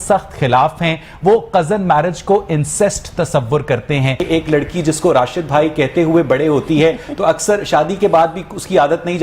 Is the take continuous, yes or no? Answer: no